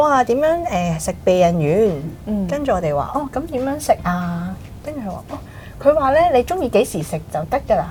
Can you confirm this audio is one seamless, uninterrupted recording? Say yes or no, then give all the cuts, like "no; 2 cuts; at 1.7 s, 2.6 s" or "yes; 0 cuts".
yes; 0 cuts